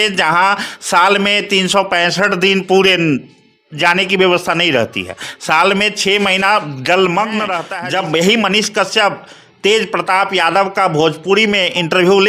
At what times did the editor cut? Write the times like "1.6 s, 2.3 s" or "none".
7.7 s